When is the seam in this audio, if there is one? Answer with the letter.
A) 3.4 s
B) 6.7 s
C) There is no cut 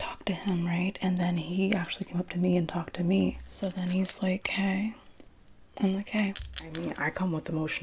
B